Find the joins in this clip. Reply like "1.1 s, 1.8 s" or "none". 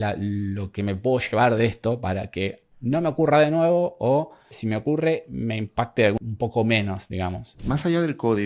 2.7 s, 6.2 s, 7.6 s